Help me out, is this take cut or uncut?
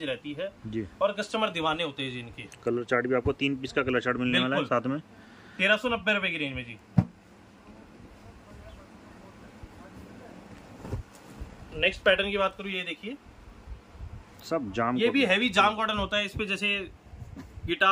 uncut